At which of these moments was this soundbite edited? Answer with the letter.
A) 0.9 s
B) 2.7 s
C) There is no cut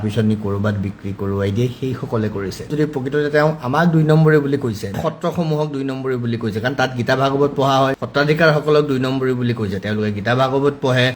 B